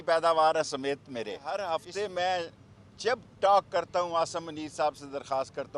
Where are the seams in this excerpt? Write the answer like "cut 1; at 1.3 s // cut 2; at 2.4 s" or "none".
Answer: cut 1; at 1.4 s